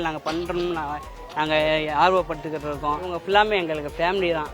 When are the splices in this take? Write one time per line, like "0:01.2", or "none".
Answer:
0:03.1